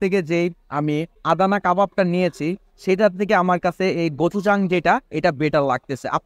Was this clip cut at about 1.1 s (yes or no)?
yes